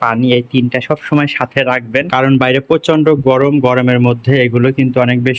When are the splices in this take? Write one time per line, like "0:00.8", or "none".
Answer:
0:02.1

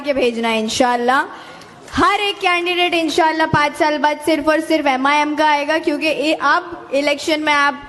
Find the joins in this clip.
none

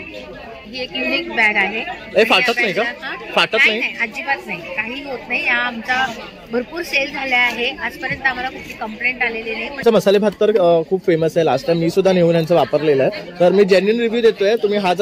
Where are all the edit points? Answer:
0:09.8

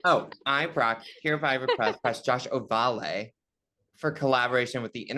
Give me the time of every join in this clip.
0:02.0

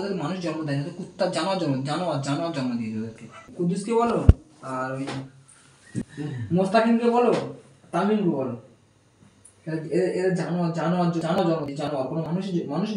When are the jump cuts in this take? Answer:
0:03.4
0:06.0

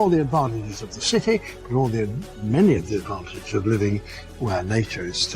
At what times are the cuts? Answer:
0:01.5

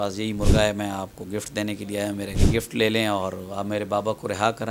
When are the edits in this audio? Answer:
0:02.4

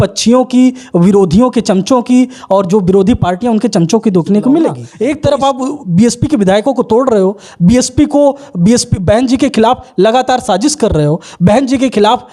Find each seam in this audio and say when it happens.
0:04.9

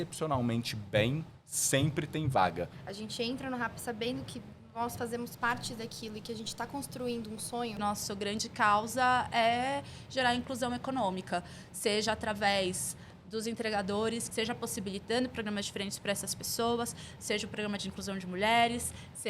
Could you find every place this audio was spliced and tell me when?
0:02.8
0:07.8
0:14.3

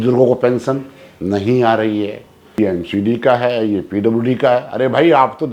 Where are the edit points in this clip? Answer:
0:02.6

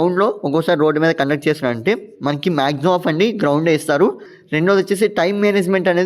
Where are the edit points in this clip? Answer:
0:04.3

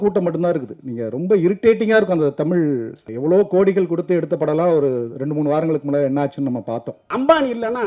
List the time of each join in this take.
0:03.0
0:07.0

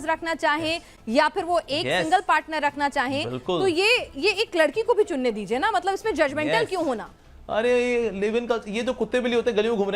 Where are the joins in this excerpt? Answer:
0:00.9
0:07.1

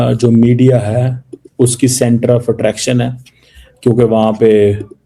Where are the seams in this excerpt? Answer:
none

